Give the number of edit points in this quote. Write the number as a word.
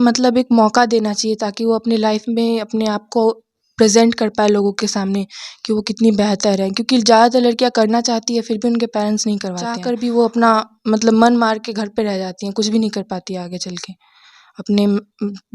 one